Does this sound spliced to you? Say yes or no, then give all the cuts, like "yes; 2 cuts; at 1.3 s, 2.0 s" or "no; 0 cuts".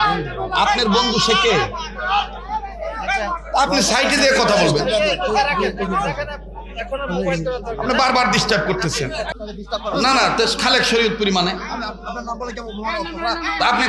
yes; 1 cut; at 9.4 s